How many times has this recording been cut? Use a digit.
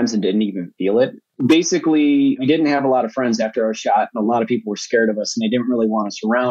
2